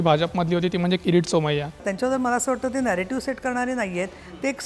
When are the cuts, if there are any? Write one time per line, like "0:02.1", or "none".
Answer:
0:01.9